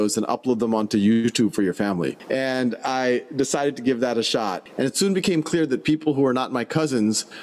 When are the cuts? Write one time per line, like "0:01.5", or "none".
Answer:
0:02.2
0:04.6